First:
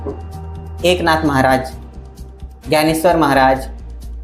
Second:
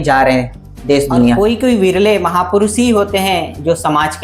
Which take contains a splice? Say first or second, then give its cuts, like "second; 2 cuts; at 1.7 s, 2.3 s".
second; 1 cut; at 1.4 s